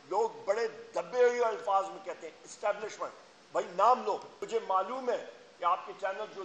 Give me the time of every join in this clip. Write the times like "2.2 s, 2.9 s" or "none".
4.3 s